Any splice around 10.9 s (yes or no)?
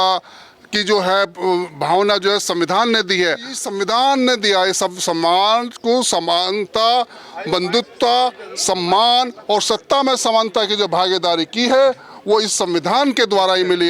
no